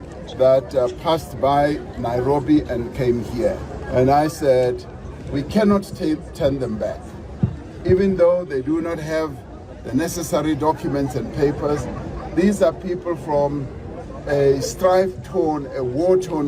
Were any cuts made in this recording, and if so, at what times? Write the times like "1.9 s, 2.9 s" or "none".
3.7 s